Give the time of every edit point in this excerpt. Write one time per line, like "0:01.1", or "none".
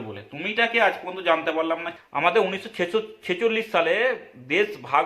0:01.9

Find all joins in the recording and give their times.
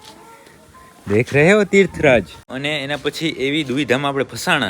0:02.5

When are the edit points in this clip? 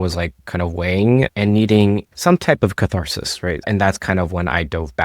0:03.7

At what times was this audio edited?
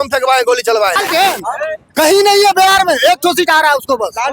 0:01.0

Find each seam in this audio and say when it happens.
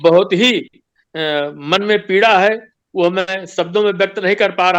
none

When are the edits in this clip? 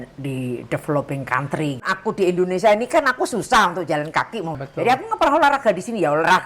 0:01.8
0:04.6

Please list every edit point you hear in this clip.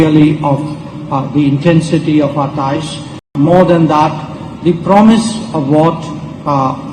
0:03.3

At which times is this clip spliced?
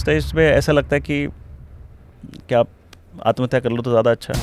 none

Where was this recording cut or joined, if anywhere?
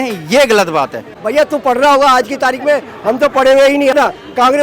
0:01.2
0:03.9

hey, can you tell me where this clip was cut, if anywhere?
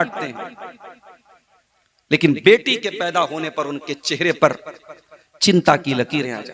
none

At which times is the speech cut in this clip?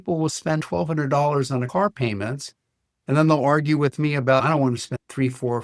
0:01.7

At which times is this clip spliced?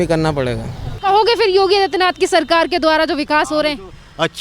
0:00.9

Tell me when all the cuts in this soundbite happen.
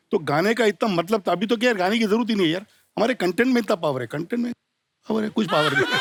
none

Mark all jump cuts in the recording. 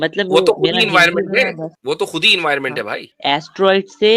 0:01.7
0:03.0

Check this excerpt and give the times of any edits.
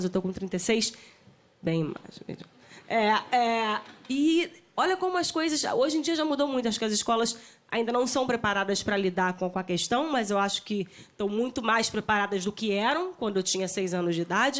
0:08.6

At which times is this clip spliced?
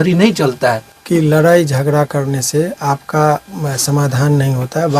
0:00.9

